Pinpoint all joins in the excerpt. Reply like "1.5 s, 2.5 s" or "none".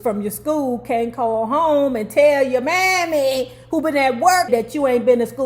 4.5 s

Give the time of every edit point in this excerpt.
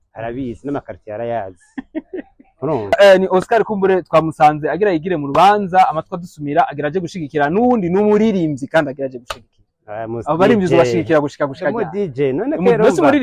3.0 s

